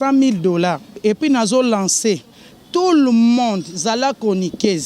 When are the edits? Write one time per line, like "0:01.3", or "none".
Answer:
0:01.0